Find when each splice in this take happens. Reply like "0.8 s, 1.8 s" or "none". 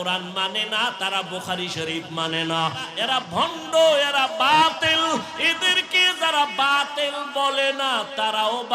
2.9 s